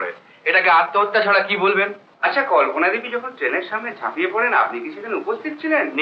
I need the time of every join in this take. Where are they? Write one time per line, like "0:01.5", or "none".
0:02.0